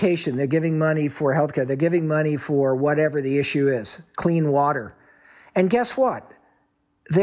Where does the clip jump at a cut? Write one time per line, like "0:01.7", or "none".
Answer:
none